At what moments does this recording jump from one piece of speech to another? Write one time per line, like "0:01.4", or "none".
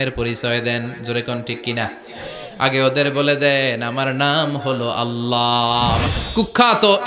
0:06.1